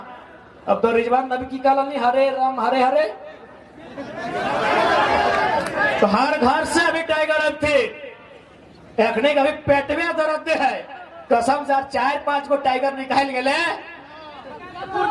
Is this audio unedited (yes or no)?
yes